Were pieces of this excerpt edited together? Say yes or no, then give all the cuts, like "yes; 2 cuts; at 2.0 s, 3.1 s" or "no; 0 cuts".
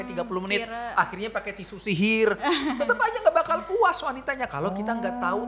no; 0 cuts